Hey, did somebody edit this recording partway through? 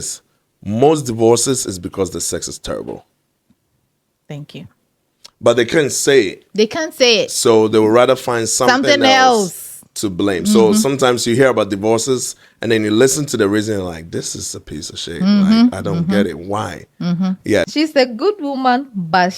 yes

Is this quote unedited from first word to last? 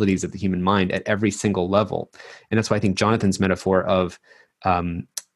yes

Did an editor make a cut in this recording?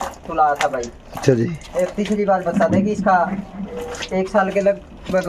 no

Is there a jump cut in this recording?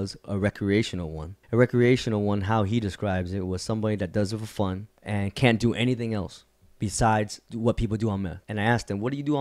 yes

